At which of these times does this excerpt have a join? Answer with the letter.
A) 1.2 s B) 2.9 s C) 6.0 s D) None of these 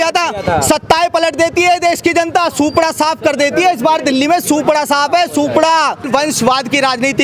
C